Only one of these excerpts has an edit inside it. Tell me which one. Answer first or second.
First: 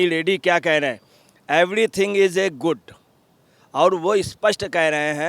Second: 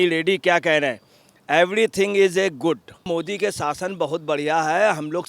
second